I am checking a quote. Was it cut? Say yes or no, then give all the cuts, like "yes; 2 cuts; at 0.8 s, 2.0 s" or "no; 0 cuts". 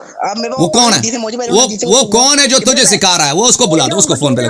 no; 0 cuts